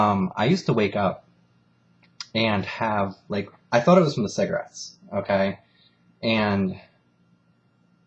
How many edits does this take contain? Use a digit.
1